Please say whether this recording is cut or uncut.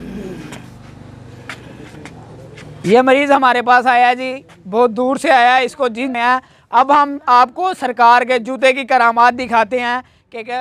uncut